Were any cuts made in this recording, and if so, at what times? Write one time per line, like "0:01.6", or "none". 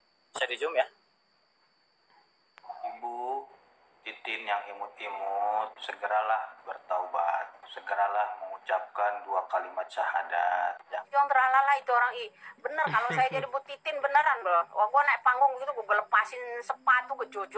0:03.0
0:11.0